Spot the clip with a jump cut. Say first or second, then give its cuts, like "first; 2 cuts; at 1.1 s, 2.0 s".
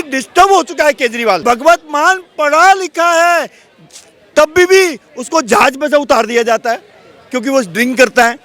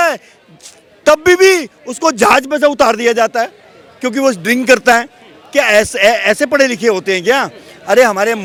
first; 1 cut; at 1.4 s